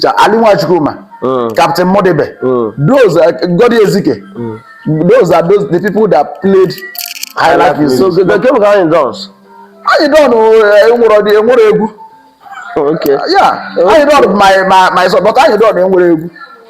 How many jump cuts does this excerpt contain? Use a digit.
1